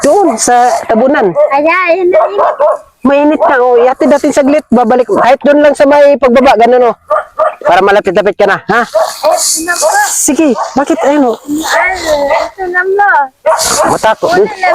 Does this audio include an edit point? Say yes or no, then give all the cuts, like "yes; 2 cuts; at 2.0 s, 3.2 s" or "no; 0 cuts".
no; 0 cuts